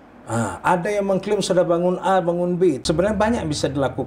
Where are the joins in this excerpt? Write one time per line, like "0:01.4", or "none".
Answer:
0:02.8

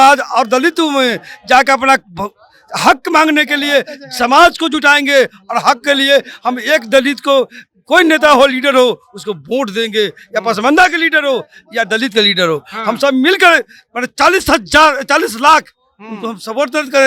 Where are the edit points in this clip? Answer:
none

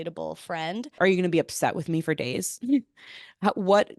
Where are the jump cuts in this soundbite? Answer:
0:01.0

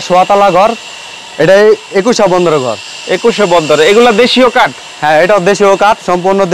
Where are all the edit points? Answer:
none

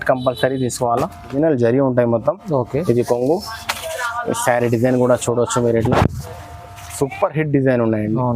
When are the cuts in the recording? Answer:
0:01.3

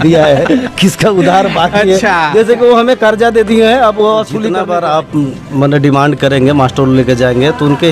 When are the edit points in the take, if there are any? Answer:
0:04.5

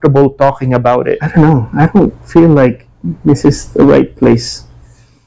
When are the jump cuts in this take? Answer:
0:01.3

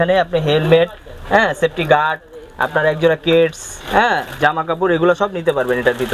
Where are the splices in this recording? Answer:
none

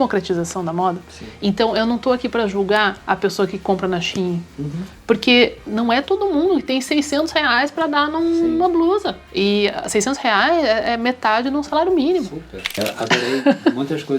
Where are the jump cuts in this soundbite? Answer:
0:09.2
0:12.8

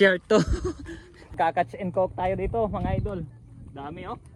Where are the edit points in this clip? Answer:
0:01.3

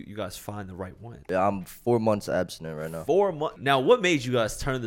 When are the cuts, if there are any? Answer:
0:01.2
0:03.6

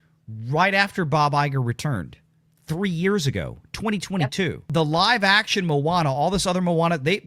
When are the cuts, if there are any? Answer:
0:04.7

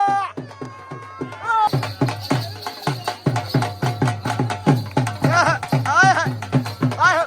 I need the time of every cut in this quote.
0:01.7

